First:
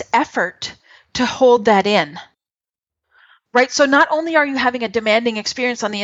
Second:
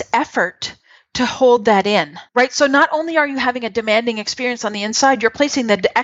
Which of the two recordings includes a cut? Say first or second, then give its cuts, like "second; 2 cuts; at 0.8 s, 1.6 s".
second; 1 cut; at 2.2 s